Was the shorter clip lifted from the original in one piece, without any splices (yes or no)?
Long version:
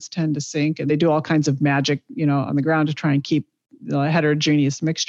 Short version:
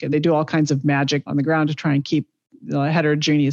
no